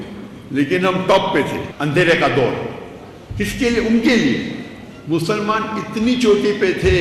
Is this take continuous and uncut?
no; 1 cut; at 1.7 s

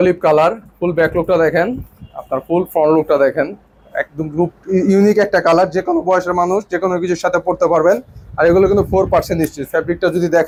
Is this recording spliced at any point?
no; 0 cuts

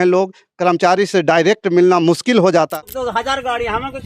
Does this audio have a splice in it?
yes; 1 cut; at 2.8 s

